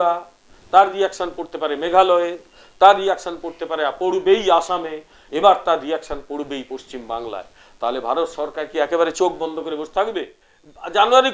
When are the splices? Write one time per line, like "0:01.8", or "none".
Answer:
0:10.4